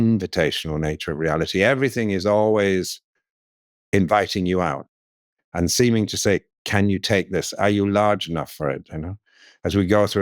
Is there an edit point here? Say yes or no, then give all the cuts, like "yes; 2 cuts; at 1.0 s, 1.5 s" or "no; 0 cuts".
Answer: no; 0 cuts